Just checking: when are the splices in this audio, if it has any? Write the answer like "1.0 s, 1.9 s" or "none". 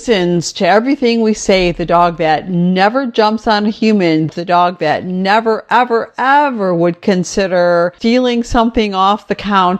4.3 s, 8.0 s